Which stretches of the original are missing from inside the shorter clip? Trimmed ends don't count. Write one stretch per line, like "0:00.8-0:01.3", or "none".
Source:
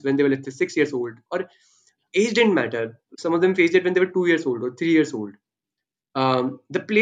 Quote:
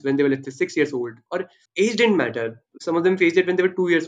0:01.6-0:02.0